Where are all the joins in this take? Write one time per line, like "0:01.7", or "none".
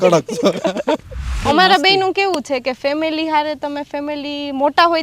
0:01.4